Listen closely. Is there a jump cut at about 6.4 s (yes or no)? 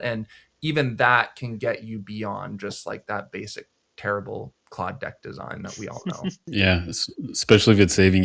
yes